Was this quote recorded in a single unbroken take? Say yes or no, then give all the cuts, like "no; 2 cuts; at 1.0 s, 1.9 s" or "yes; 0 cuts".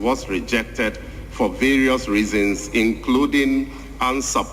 yes; 0 cuts